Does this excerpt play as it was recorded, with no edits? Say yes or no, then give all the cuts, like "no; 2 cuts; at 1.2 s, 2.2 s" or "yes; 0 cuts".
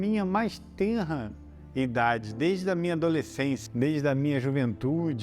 no; 1 cut; at 3.7 s